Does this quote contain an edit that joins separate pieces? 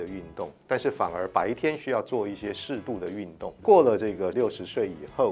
yes; 2 cuts; at 3.6 s, 4.3 s

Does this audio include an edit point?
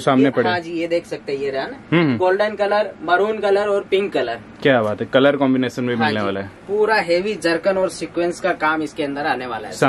no; 0 cuts

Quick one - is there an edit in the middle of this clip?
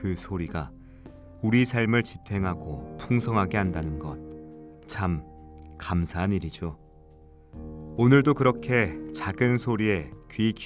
no; 0 cuts

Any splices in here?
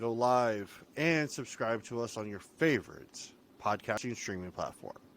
yes; 1 cut; at 4.0 s

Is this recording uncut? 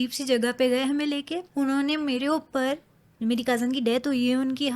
no; 1 cut; at 1.4 s

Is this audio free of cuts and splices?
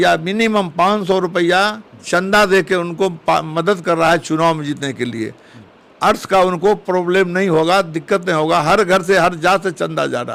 yes; 0 cuts

